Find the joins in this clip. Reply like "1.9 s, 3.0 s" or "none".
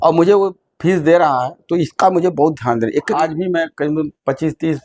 3.1 s